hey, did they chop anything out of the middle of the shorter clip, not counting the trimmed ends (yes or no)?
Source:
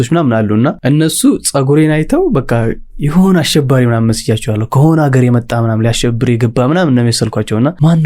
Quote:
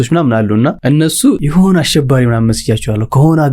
yes